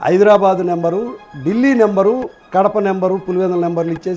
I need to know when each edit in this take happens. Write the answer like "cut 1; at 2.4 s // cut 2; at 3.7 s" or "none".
cut 1; at 2.4 s